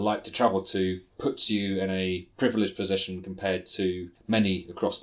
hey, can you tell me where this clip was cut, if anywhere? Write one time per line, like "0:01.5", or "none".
0:01.1
0:04.1